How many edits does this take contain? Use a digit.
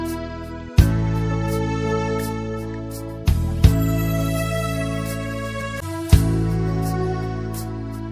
1